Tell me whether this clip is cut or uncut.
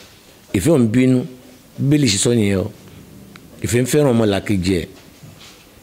uncut